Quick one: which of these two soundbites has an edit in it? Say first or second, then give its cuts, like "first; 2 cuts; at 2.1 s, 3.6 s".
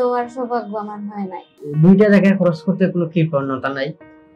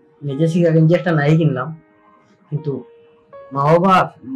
first; 1 cut; at 1.6 s